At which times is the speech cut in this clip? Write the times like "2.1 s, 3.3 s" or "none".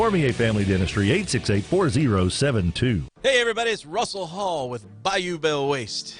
3.1 s

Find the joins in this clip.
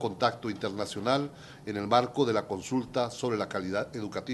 none

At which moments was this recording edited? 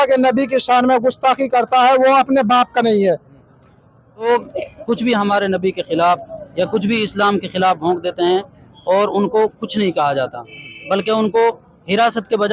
4.2 s

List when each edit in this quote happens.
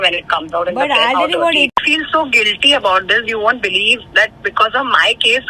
1.7 s

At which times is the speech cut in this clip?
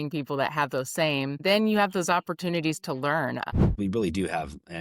1.4 s, 3.5 s

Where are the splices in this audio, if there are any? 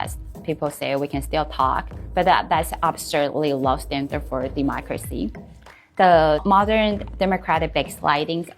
5.5 s

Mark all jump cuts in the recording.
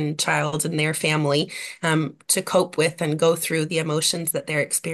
none

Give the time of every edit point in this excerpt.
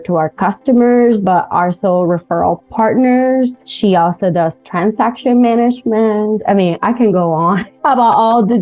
3.7 s, 6.4 s, 7.7 s

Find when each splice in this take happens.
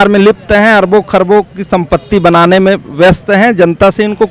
none

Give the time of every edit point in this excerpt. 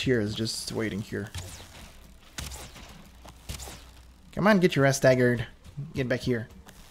none

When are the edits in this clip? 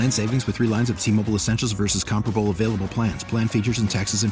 none

